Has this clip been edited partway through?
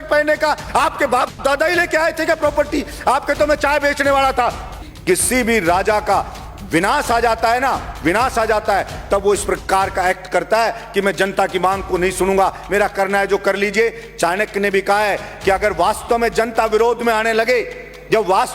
yes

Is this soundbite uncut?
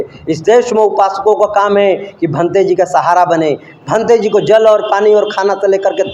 yes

